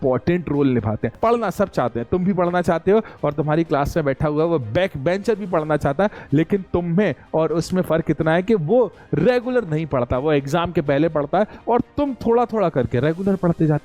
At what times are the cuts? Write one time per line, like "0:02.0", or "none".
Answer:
0:01.1